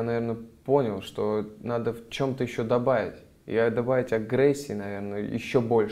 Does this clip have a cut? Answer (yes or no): no